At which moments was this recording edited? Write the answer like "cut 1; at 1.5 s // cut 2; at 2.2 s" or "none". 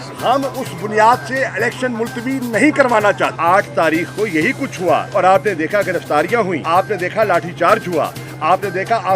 cut 1; at 3.3 s // cut 2; at 5.1 s // cut 3; at 6.6 s

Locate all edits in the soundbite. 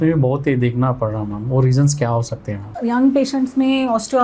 cut 1; at 2.7 s

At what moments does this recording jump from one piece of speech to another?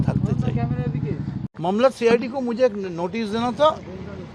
cut 1; at 1.7 s

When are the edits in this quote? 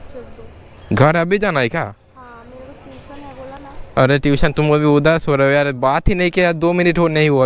none

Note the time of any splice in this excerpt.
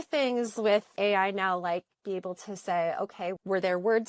cut 1; at 0.9 s // cut 2; at 3.4 s

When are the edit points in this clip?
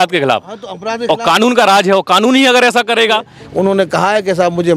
cut 1; at 3.4 s

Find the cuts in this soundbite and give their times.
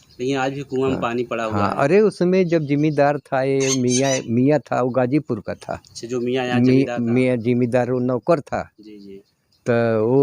none

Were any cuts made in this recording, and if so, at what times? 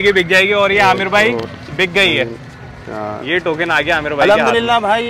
none

